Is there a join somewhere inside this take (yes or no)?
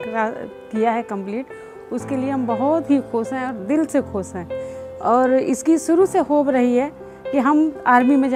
no